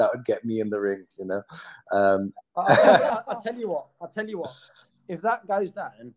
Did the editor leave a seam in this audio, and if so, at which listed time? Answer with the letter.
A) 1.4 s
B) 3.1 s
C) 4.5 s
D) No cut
B